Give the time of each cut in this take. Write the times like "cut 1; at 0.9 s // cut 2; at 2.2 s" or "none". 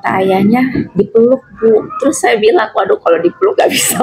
none